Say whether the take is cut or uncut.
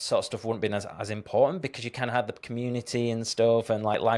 uncut